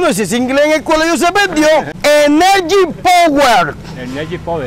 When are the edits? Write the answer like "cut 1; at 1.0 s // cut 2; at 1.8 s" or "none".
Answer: cut 1; at 1.9 s